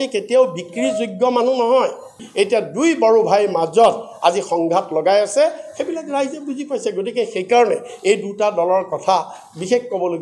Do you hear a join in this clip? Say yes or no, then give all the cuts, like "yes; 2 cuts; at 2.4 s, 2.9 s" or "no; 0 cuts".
yes; 1 cut; at 2.2 s